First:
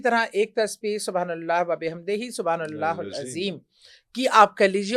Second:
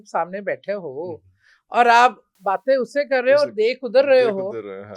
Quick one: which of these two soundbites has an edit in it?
second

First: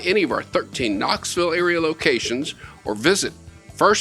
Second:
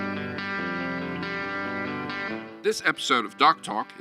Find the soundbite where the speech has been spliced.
second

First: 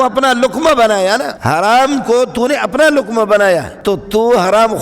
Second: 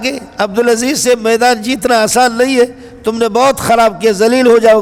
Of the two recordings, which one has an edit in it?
first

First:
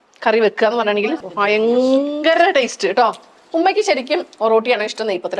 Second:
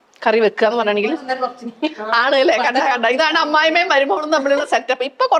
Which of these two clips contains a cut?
first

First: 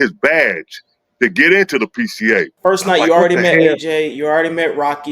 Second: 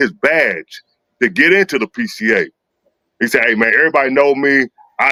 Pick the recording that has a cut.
first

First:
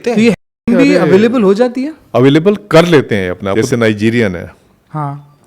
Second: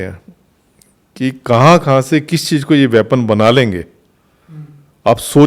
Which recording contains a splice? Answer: first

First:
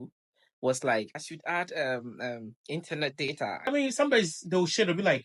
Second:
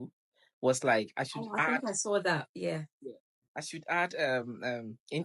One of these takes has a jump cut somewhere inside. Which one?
first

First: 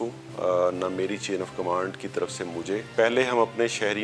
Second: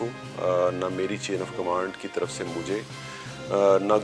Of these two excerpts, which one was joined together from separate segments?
first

